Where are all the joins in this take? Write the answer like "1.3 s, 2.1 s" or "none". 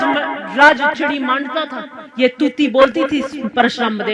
none